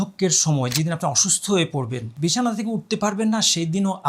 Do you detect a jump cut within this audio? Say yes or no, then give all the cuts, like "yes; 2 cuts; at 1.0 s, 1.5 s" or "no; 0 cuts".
yes; 1 cut; at 2.0 s